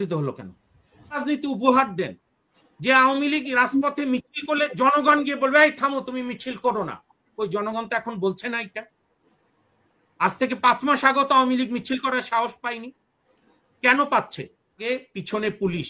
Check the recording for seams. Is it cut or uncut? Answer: cut